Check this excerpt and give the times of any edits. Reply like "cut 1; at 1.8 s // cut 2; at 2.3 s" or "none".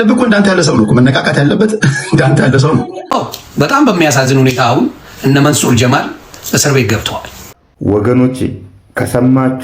cut 1; at 3.0 s // cut 2; at 7.7 s